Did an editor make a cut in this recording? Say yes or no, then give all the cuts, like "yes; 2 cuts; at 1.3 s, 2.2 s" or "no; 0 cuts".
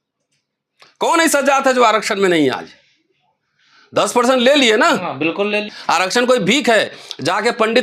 yes; 1 cut; at 5.7 s